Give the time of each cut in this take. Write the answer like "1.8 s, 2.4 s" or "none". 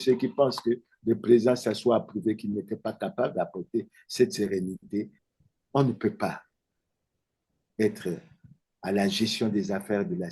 5.2 s